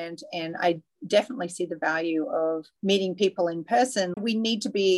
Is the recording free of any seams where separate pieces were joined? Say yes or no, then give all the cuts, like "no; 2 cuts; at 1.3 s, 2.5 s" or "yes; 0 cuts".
no; 2 cuts; at 2.7 s, 4.1 s